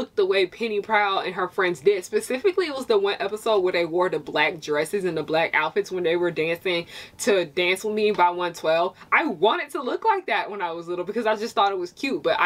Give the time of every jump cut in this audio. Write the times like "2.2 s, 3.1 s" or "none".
none